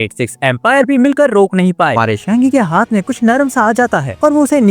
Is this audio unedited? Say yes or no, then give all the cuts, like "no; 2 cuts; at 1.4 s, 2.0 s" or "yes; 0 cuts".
no; 1 cut; at 1.9 s